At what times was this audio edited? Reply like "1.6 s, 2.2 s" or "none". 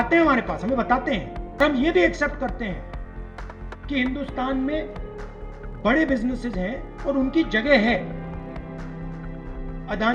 1.6 s